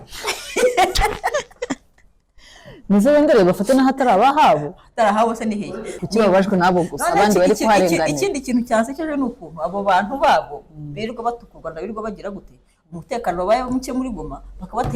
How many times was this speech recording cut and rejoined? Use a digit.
1